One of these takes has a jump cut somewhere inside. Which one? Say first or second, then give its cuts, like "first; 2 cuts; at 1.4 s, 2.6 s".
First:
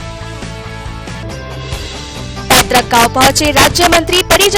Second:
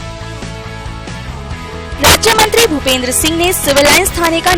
second; 1 cut; at 1.2 s